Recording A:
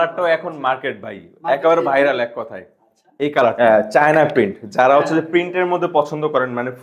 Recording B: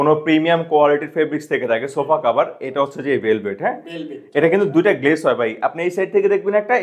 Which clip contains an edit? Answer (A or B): A